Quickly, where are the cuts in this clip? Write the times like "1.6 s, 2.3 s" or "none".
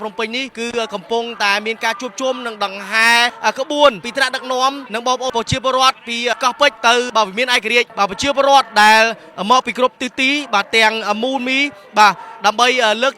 7.9 s